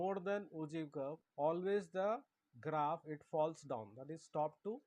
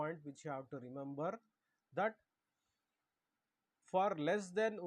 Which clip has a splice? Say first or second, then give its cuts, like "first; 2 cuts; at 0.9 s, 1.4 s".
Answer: first; 1 cut; at 1.2 s